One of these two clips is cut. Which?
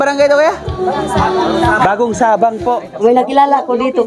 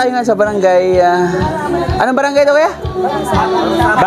first; 1 cut; at 2.9 s

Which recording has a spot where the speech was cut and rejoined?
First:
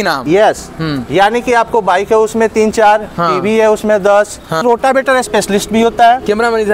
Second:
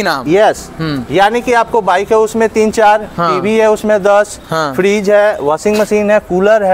first; 1 cut; at 4.6 s

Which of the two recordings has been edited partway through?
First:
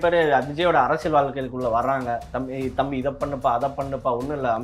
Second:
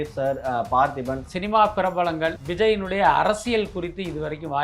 second; 2 cuts; at 1.3 s, 2.4 s

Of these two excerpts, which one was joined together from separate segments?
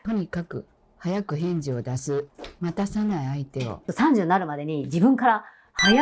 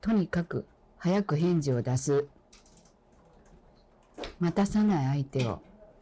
first; 2 cuts; at 2.4 s, 3.8 s

